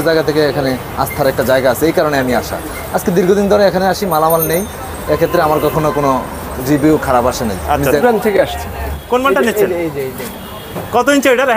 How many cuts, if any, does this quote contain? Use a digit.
2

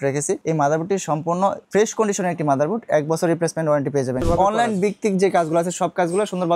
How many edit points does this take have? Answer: 1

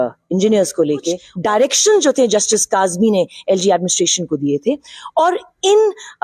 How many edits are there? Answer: 1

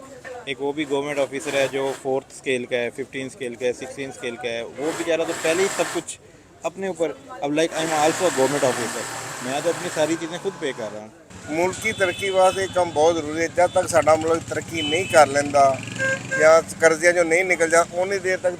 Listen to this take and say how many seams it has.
1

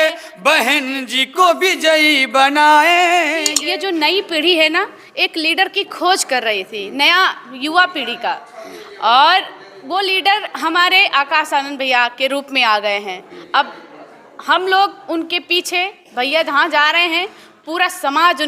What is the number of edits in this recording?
1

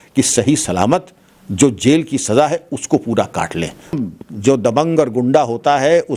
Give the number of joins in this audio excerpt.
1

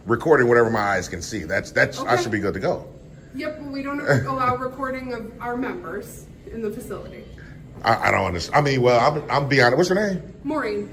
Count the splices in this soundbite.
0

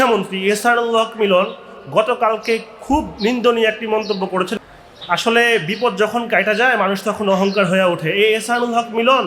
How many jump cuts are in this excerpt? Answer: 1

